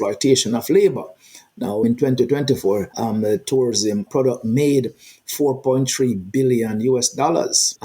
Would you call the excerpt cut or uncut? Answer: cut